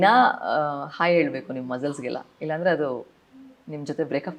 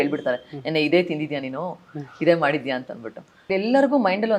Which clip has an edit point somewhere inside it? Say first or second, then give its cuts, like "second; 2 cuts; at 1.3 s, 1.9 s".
second; 1 cut; at 3.4 s